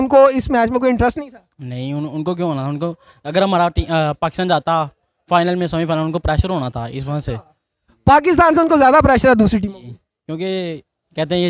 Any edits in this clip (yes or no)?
no